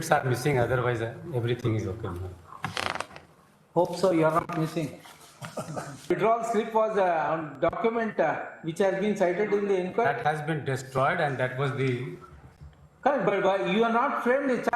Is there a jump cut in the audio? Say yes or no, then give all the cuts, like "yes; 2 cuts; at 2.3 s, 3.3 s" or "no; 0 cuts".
yes; 1 cut; at 6.1 s